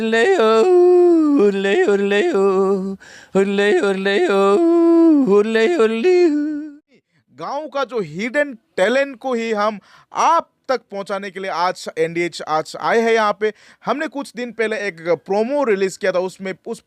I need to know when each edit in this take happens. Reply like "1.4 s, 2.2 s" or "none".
7.0 s